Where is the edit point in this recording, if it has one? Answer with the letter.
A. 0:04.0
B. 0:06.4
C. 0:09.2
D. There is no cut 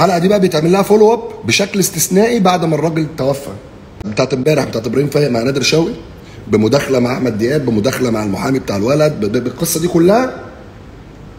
A